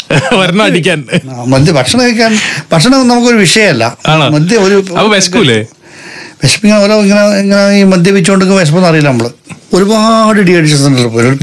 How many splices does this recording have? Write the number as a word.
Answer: one